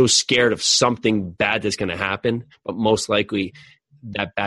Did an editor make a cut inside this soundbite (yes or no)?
no